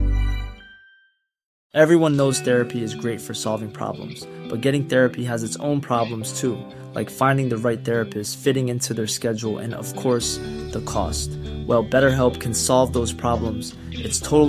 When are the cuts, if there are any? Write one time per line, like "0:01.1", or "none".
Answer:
0:01.6